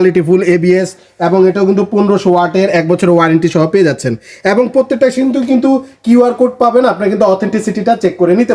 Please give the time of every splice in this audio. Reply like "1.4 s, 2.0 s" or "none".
none